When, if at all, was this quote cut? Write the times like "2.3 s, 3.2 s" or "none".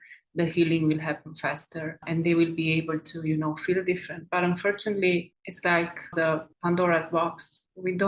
2.0 s, 6.1 s